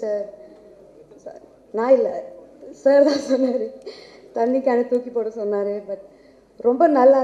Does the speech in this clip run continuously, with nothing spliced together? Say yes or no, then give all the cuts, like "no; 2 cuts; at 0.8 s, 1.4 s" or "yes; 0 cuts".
yes; 0 cuts